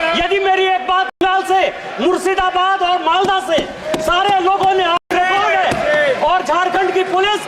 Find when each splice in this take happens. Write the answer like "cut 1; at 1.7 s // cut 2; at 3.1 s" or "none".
cut 1; at 1.2 s // cut 2; at 5.1 s